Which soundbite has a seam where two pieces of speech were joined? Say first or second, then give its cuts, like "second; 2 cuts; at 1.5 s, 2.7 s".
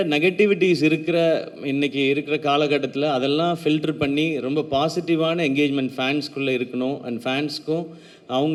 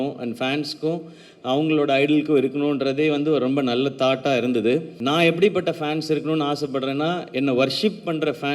second; 1 cut; at 4.9 s